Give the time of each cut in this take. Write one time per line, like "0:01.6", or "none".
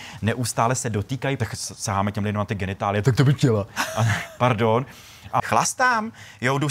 0:01.4
0:03.8
0:05.5